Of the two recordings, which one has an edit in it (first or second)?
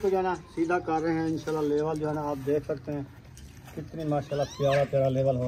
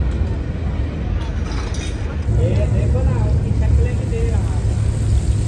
second